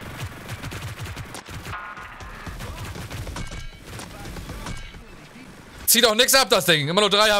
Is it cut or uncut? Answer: uncut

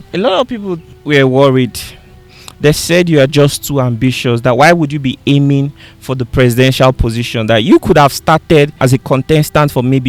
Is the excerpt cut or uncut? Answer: cut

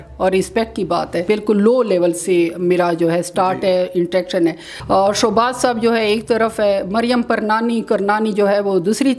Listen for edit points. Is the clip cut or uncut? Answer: cut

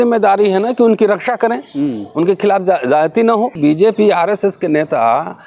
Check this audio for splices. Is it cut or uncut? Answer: cut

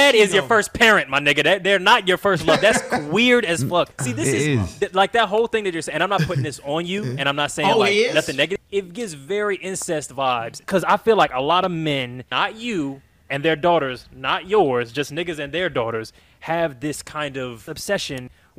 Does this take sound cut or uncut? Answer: cut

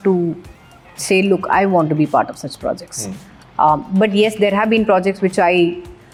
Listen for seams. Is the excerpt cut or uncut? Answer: uncut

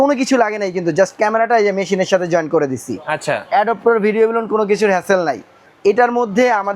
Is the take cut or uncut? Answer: uncut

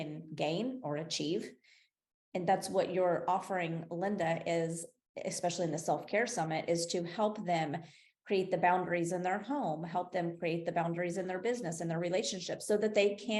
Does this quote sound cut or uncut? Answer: uncut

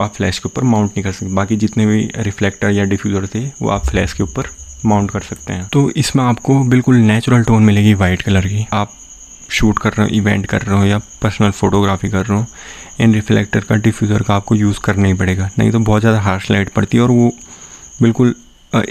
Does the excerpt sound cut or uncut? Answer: cut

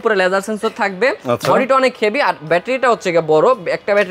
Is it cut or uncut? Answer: uncut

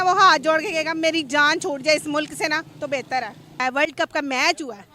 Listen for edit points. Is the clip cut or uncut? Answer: cut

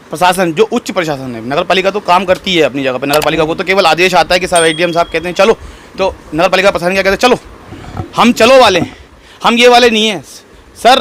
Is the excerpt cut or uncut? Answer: uncut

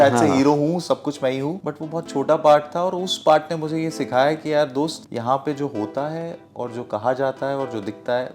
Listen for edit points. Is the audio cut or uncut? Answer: cut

